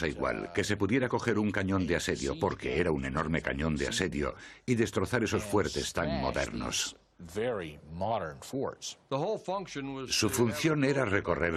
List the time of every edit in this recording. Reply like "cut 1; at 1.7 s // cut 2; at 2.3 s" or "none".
none

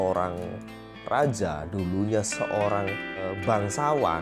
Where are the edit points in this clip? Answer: cut 1; at 3.3 s

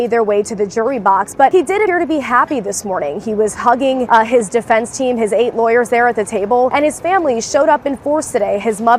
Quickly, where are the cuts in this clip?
cut 1; at 1.8 s // cut 2; at 4.1 s // cut 3; at 6.7 s

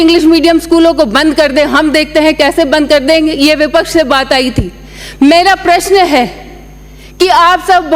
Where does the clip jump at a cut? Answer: none

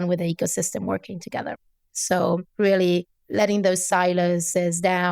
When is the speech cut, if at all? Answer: cut 1; at 1.7 s

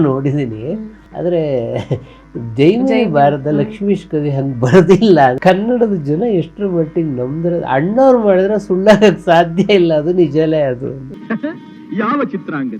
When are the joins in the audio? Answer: cut 1; at 5.4 s // cut 2; at 11.1 s

